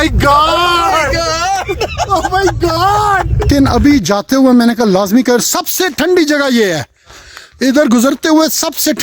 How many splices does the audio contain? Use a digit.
1